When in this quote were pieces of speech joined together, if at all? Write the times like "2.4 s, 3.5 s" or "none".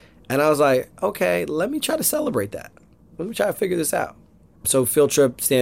4.6 s